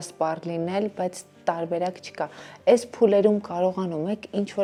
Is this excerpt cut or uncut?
uncut